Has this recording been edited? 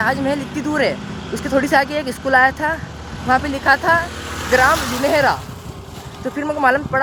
no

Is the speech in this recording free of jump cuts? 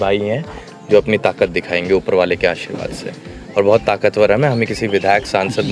yes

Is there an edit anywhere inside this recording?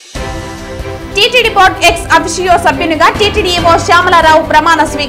no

